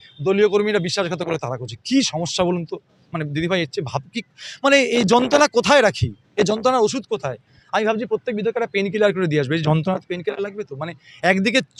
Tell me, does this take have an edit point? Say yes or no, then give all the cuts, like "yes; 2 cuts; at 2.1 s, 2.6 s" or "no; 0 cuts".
no; 0 cuts